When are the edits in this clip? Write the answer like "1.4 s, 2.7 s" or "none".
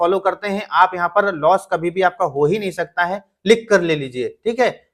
none